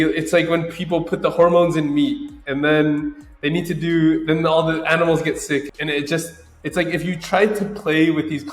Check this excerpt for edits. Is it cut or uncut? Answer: uncut